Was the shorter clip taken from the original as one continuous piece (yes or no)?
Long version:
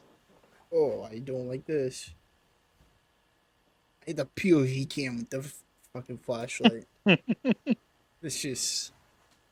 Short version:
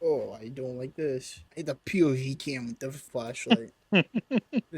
no